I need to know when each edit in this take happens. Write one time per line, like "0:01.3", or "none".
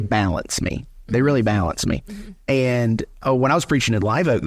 0:03.1